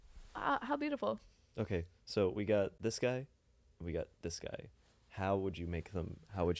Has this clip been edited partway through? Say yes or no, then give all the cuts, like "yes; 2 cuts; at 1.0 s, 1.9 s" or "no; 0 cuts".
no; 0 cuts